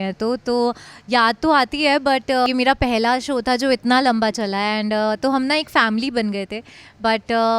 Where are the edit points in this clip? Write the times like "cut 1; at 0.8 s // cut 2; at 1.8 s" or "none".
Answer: cut 1; at 2.5 s